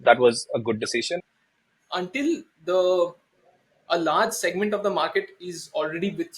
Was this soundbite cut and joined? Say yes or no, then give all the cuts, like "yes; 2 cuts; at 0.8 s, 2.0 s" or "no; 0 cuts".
yes; 1 cut; at 1.2 s